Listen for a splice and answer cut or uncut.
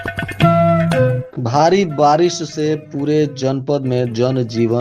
cut